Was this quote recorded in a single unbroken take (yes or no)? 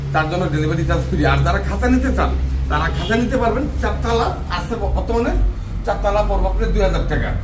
yes